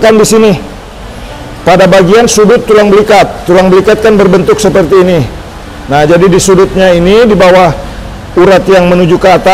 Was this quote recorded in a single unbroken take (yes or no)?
yes